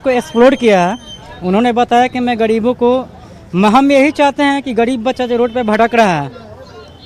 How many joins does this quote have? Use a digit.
0